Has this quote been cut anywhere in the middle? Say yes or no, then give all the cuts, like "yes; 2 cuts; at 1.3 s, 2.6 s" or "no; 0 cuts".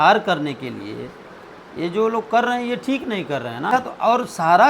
yes; 1 cut; at 3.7 s